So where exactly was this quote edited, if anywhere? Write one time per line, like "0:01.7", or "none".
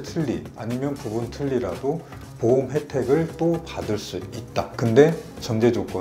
none